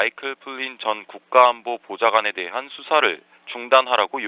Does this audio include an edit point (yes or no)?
no